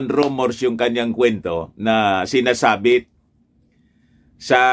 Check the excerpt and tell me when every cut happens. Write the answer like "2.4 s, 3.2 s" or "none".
none